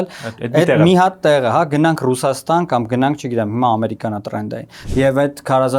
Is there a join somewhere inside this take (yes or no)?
yes